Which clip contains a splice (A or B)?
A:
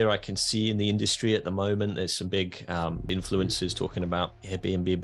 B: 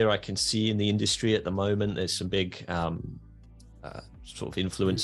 A